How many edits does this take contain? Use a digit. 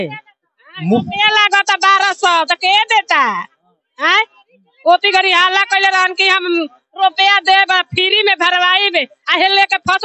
0